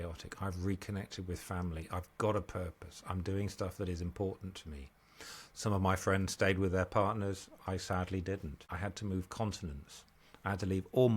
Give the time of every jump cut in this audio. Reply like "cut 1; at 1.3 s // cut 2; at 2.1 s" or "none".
cut 1; at 8.6 s